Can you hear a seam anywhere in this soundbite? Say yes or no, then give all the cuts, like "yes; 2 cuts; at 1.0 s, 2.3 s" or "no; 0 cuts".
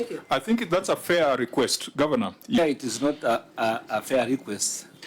yes; 1 cut; at 2.6 s